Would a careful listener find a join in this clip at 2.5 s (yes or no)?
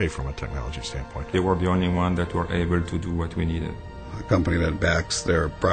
no